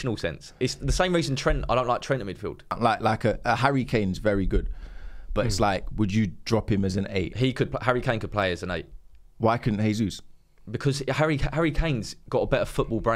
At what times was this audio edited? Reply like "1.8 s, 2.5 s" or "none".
2.8 s